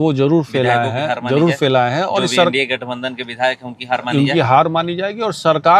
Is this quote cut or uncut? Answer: uncut